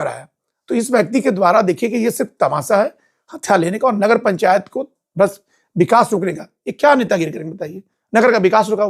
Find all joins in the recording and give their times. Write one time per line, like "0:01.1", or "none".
none